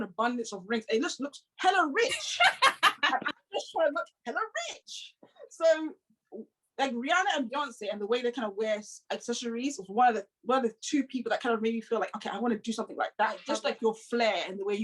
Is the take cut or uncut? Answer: cut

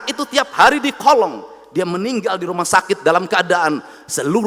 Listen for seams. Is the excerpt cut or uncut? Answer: uncut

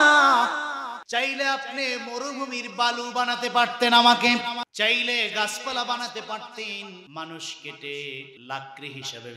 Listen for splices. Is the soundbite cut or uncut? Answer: cut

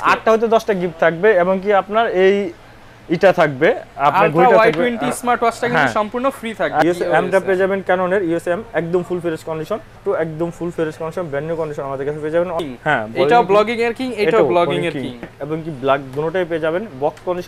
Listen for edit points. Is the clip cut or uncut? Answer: cut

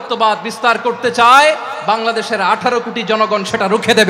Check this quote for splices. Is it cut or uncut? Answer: uncut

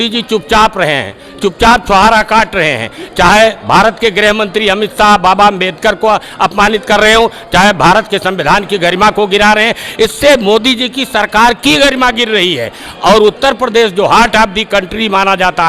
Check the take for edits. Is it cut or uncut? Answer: uncut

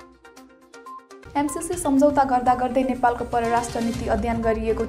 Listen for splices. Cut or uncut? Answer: cut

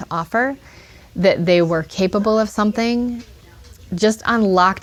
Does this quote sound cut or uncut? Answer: uncut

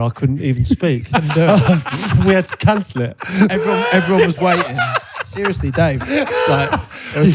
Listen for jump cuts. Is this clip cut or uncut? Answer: uncut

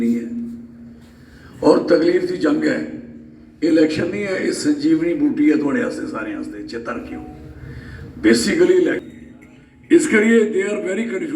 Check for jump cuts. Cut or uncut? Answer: cut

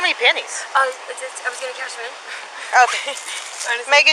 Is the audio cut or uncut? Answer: uncut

